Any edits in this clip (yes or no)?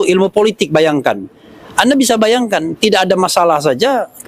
no